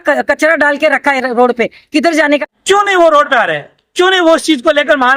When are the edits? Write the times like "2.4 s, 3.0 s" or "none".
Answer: 2.5 s